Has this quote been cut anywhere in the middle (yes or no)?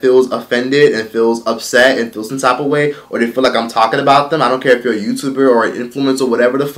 no